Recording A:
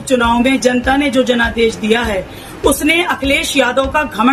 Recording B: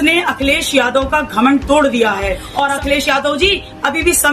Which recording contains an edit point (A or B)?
B